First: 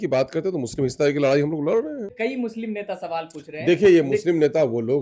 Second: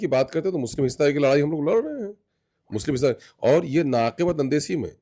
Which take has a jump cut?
first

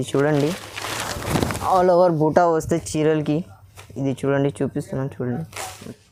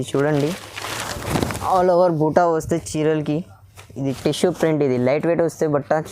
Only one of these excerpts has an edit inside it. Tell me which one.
second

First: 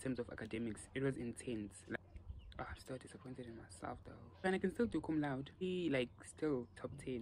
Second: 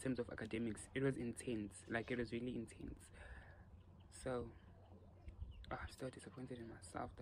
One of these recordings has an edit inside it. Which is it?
first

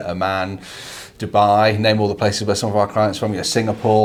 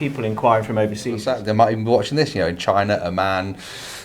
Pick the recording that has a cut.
second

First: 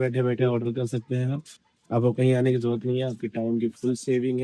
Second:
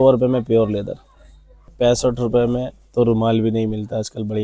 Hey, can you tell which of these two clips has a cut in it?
second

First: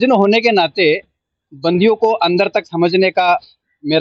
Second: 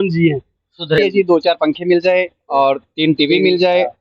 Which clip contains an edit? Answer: second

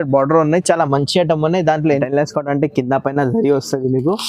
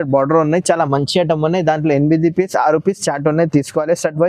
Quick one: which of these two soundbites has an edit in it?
first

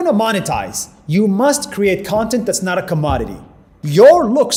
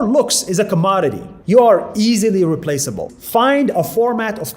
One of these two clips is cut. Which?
second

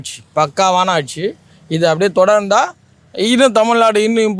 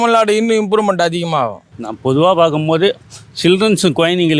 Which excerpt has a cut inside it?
second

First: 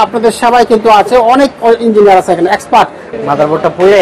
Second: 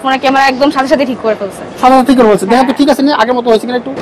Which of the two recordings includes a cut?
first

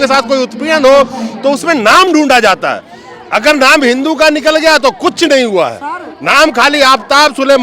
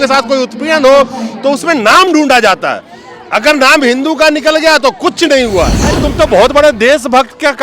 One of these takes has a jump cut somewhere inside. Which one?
second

